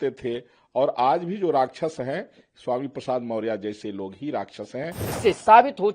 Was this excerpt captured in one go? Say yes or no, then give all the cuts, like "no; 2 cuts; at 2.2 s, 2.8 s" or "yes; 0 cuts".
no; 1 cut; at 5.0 s